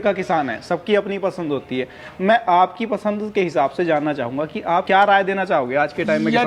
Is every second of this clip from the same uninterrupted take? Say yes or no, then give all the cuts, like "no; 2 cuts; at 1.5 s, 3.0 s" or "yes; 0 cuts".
yes; 0 cuts